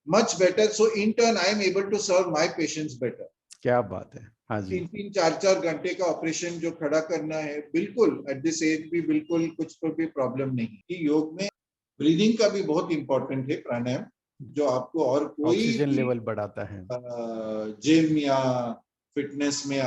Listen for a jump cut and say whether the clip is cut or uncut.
cut